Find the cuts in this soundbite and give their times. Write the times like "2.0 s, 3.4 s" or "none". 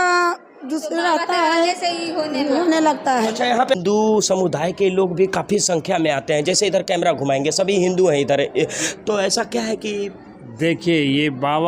3.8 s

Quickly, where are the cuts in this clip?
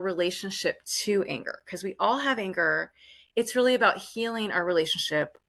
none

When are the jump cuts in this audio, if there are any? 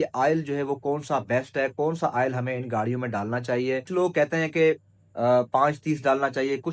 3.9 s

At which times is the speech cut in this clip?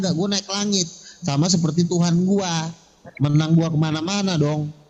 none

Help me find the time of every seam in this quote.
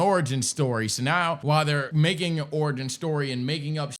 1.6 s

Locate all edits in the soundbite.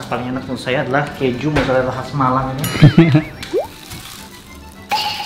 none

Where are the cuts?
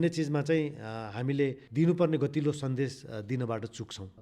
1.6 s

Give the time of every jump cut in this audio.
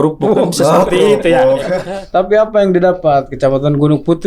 1.8 s

